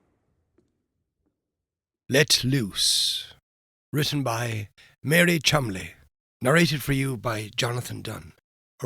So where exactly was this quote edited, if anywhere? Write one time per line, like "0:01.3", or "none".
0:01.9

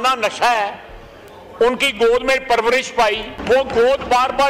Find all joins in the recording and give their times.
0:03.3

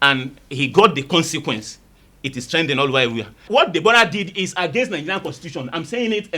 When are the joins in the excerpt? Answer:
0:03.4

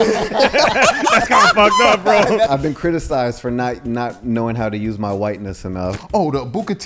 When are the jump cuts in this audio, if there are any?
0:02.5
0:05.9

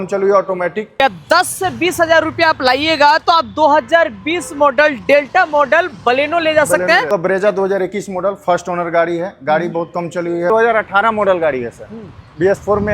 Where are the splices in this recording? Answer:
0:01.0
0:07.1
0:10.5

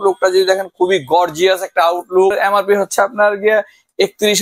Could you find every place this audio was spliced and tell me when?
0:02.3

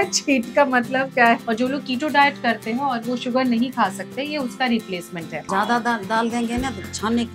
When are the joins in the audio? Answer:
0:01.4
0:05.5

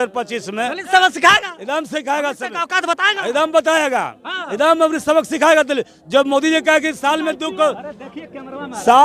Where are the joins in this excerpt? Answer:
none

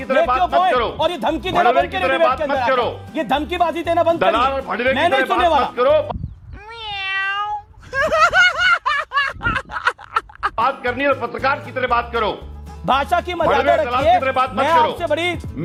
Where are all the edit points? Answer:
none

